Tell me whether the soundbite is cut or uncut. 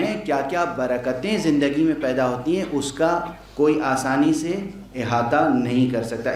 uncut